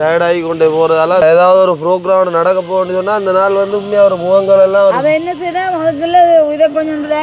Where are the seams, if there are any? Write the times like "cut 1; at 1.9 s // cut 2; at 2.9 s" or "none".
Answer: cut 1; at 1.2 s